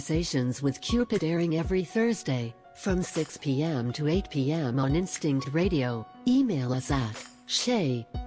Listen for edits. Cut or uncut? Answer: uncut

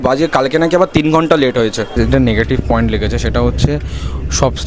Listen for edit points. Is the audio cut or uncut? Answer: cut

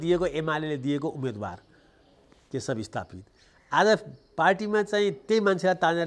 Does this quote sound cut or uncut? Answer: uncut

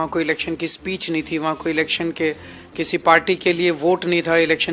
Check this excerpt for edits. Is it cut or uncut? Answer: uncut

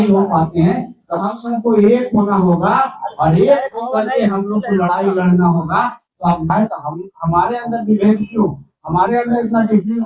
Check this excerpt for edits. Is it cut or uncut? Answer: cut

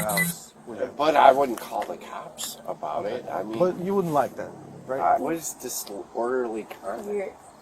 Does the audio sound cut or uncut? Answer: cut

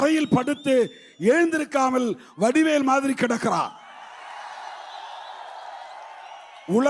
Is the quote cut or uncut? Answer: uncut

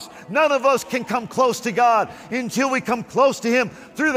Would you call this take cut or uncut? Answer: uncut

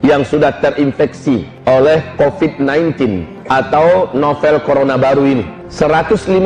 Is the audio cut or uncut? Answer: cut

